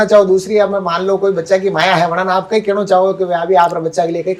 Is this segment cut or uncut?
uncut